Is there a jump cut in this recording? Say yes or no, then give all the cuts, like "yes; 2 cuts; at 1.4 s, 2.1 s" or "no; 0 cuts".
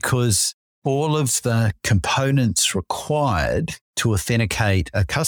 yes; 1 cut; at 3.8 s